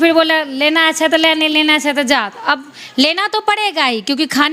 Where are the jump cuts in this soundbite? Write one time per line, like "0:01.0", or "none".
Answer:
none